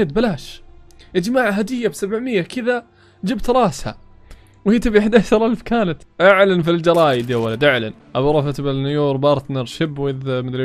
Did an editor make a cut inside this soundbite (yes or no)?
yes